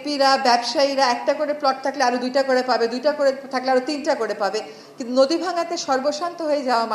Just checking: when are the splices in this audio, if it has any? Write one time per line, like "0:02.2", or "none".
none

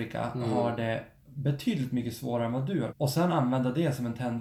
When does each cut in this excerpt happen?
0:02.9

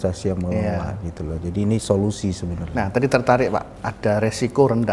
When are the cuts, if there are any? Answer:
none

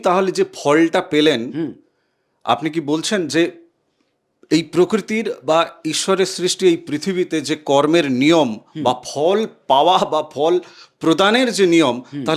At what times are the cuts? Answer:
none

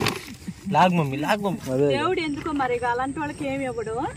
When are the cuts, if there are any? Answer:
0:01.6

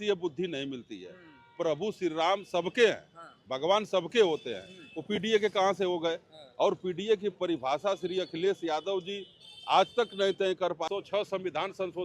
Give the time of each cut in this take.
0:10.9

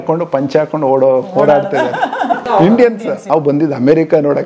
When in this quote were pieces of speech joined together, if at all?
0:02.4
0:03.2

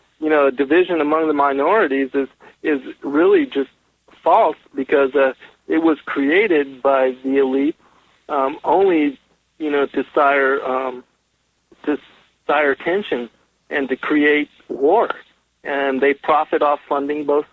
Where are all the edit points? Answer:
0:14.3

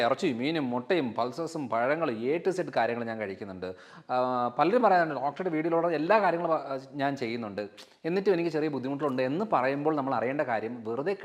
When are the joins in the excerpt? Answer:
none

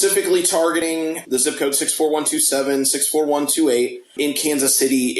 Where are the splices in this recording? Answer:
0:01.1
0:04.0

